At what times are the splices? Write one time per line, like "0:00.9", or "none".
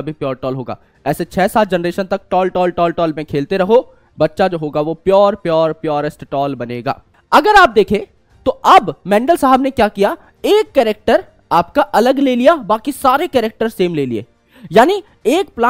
0:07.1